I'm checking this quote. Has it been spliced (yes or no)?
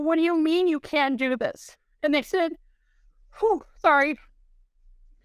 no